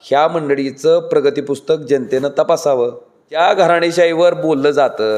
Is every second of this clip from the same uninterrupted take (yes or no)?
no